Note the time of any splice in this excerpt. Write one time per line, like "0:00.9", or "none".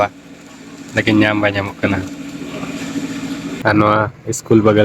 0:03.6